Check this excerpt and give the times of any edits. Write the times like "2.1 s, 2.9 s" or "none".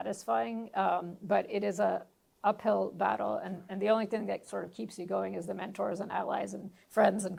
none